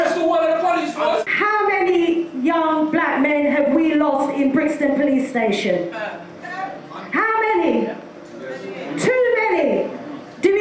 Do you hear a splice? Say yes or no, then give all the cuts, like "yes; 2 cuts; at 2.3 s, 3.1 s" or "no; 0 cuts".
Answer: yes; 1 cut; at 1.8 s